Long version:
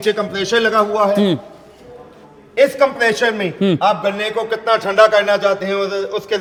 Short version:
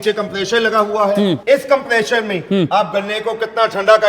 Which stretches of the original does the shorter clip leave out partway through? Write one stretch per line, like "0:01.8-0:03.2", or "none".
0:01.4-0:02.5